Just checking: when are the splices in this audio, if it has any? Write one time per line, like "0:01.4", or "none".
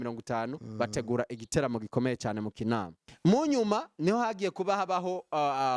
0:03.0